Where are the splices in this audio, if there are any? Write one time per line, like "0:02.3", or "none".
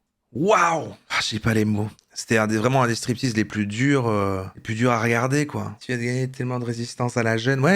0:05.8